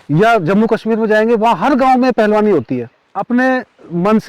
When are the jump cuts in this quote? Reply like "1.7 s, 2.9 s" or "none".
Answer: 3.2 s